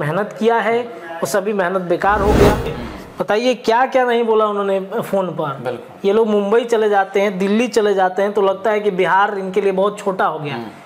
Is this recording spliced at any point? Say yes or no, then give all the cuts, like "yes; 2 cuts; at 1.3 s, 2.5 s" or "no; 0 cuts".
yes; 1 cut; at 2.8 s